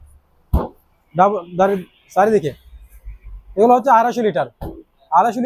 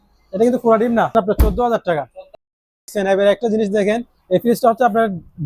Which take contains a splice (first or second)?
second